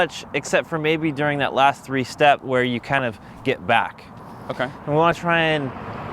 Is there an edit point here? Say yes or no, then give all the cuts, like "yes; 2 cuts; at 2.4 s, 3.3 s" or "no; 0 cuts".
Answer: no; 0 cuts